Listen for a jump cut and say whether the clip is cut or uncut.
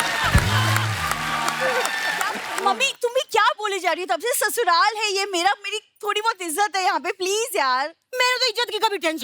cut